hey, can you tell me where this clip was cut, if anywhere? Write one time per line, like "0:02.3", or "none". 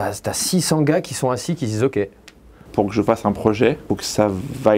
0:02.7
0:03.8